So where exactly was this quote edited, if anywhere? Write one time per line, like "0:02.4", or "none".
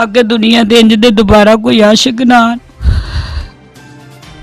0:03.5